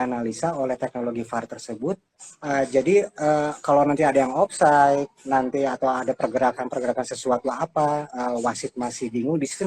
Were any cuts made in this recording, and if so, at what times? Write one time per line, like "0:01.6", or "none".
0:02.1